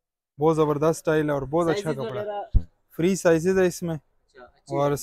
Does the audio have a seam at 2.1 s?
no; 0 cuts

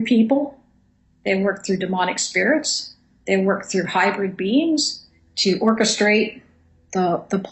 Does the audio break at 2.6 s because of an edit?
yes; 1 cut; at 2.6 s

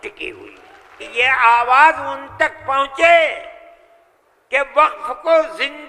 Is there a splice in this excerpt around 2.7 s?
no; 1 cut; at 1.0 s

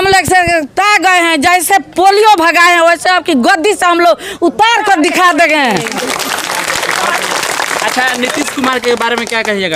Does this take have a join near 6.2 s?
no; 0 cuts

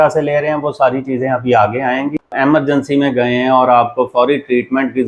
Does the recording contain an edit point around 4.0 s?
no; 1 cut; at 2.3 s

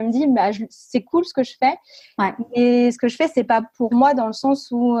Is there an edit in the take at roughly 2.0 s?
no; 0 cuts

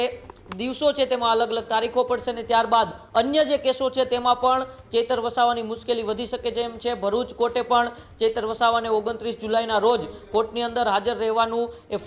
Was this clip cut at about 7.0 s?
no; 0 cuts

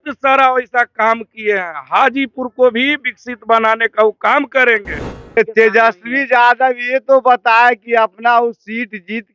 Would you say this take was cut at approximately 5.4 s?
yes; 1 cut; at 5.4 s

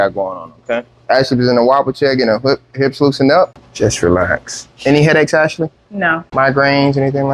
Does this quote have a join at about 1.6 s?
no; 2 cuts; at 3.6 s, 6.2 s

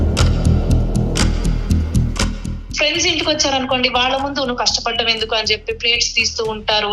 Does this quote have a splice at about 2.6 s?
yes; 1 cut; at 2.6 s

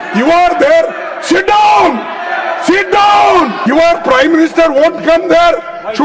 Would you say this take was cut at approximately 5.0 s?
no; 1 cut; at 3.6 s

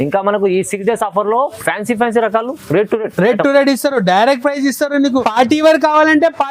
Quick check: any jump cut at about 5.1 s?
yes; 1 cut; at 5.1 s

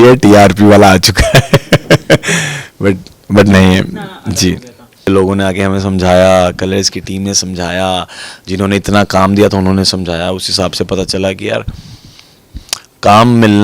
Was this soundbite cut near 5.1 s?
yes; 1 cut; at 5.1 s

